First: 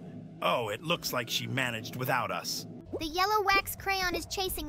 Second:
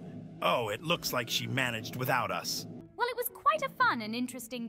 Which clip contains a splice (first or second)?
first